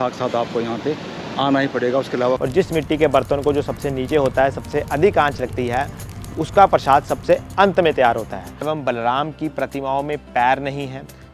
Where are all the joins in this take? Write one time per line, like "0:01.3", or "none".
0:02.4
0:08.6

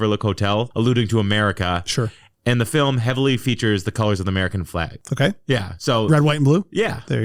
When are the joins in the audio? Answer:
none

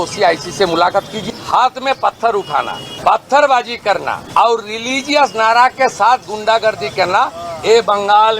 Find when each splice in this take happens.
0:01.2
0:02.8
0:04.2

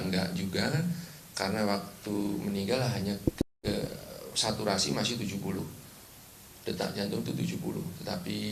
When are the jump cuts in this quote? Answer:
none

